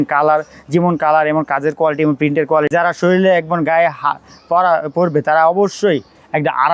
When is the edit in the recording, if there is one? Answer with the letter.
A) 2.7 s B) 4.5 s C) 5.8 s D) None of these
A